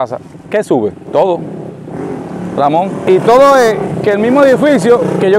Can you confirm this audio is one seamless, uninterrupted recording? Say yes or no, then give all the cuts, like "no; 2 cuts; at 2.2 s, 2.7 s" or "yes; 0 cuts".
yes; 0 cuts